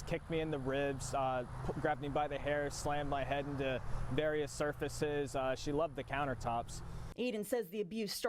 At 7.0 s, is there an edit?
yes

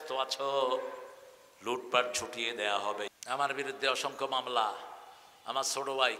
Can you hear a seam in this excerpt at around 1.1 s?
no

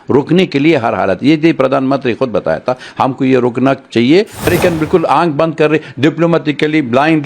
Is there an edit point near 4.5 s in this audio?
yes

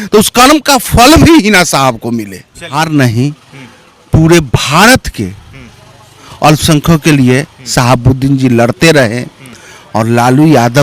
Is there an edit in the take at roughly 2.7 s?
yes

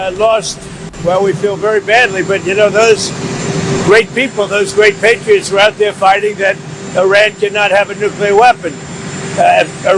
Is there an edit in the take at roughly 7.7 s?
no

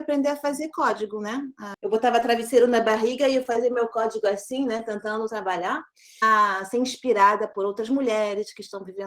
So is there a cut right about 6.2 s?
yes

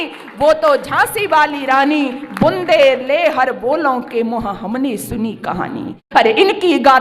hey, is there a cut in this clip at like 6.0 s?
yes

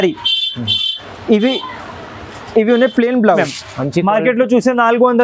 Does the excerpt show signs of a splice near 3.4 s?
yes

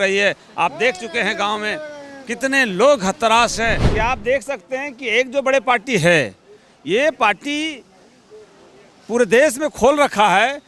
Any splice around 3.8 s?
yes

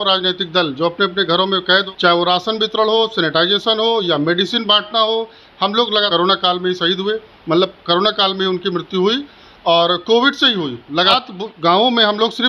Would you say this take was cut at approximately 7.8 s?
no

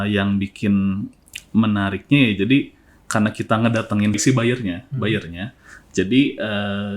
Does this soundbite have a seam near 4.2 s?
yes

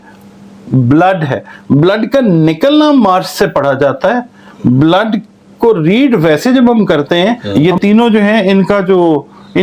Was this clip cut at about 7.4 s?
yes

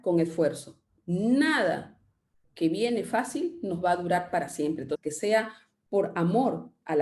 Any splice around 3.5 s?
no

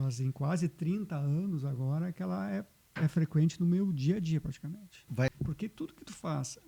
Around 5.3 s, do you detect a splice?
yes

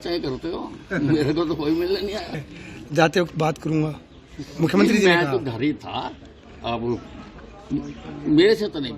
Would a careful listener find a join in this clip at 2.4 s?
yes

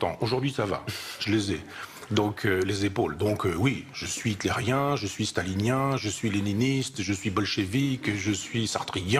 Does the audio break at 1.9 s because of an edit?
no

